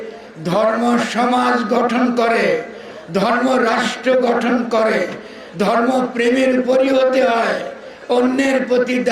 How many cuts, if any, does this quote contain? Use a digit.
0